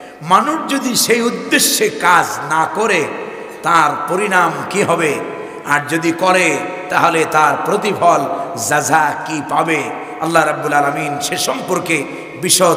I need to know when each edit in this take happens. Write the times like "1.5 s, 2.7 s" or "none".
none